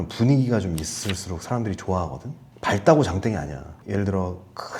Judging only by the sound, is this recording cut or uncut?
cut